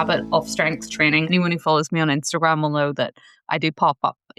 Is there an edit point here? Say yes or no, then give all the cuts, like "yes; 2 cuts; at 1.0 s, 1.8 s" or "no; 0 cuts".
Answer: yes; 1 cut; at 1.3 s